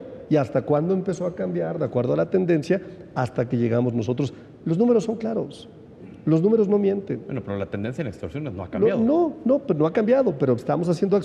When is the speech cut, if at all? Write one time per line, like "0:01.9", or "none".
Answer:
none